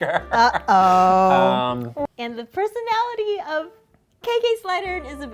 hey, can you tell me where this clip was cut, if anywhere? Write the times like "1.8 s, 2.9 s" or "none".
2.2 s

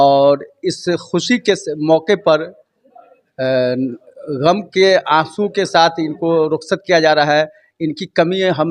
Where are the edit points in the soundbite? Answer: none

